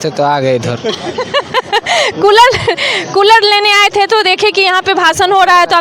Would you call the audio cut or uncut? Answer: uncut